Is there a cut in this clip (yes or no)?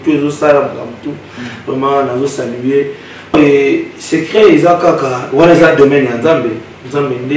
yes